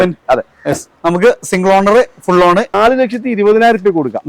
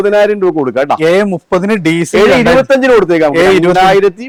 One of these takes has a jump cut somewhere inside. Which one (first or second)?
first